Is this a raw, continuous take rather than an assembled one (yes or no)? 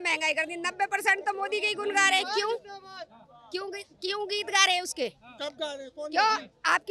yes